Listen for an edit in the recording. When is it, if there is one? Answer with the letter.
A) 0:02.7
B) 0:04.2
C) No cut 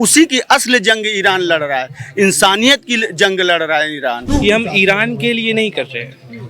B